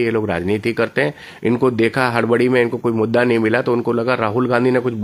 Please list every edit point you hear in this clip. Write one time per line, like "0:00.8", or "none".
none